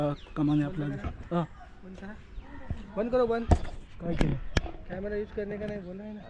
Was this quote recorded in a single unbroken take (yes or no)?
yes